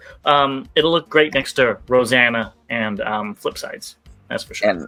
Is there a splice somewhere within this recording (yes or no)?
no